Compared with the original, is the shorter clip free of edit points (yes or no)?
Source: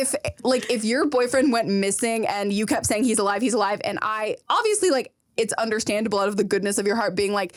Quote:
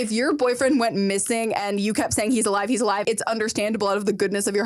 no